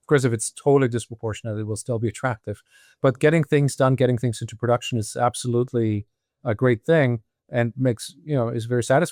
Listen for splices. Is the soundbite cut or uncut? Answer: uncut